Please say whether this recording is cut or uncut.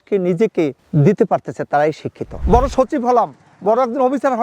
cut